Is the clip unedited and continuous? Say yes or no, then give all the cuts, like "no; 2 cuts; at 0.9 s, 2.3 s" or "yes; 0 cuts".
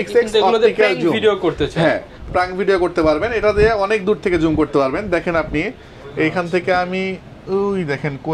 yes; 0 cuts